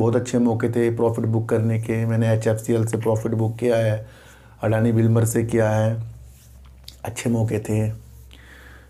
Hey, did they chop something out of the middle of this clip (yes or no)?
no